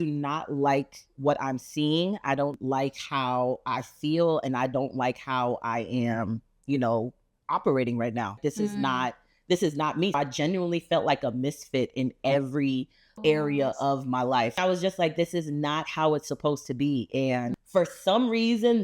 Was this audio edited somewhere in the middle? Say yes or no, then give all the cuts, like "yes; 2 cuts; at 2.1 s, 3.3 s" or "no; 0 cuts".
yes; 4 cuts; at 8.4 s, 10.2 s, 13.2 s, 14.5 s